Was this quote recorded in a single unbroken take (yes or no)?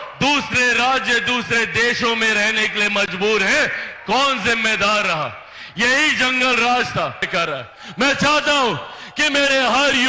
no